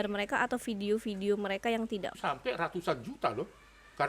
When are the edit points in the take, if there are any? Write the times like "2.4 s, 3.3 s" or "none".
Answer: 2.1 s

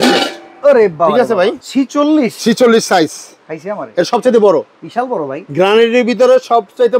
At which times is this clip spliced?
1.6 s

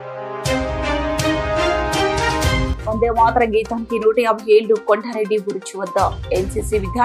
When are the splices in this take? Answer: none

